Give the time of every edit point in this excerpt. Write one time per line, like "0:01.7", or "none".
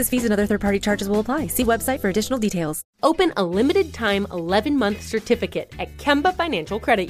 0:02.8